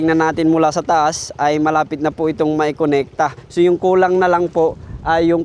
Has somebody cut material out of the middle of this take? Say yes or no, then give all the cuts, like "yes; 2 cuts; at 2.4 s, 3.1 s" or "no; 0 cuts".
yes; 1 cut; at 3.4 s